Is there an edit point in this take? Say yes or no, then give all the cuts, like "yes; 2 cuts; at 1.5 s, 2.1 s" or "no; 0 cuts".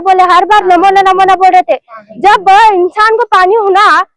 no; 0 cuts